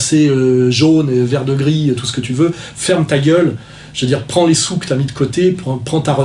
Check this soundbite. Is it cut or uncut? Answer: uncut